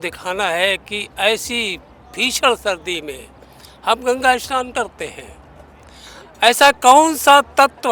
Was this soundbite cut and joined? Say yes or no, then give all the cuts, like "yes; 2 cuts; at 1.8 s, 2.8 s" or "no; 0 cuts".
no; 0 cuts